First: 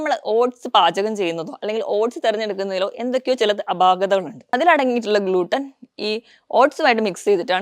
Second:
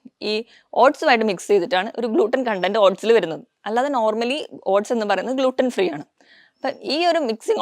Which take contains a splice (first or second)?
first